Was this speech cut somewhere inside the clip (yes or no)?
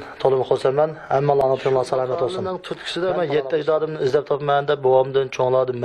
yes